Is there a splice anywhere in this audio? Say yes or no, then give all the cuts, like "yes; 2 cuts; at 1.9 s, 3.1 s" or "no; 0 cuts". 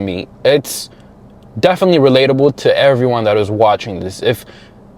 no; 0 cuts